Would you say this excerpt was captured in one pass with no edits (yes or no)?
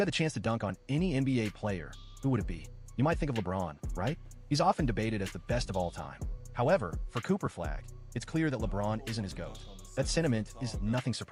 yes